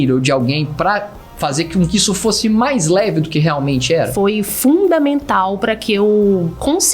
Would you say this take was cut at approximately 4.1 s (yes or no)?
yes